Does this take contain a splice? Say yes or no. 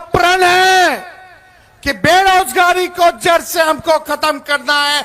no